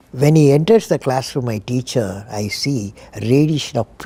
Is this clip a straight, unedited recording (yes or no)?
yes